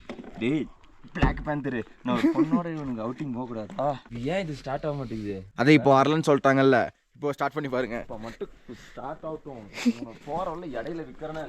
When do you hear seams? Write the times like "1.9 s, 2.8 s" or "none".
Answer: 4.1 s, 5.4 s